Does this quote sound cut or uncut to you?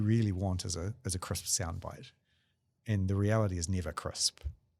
cut